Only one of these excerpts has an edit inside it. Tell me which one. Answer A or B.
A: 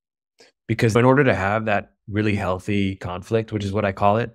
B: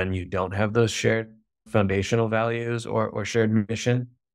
A